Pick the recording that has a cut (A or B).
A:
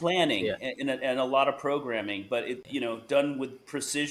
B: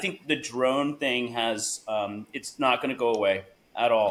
A